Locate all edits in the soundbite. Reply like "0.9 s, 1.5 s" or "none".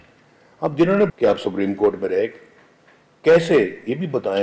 1.1 s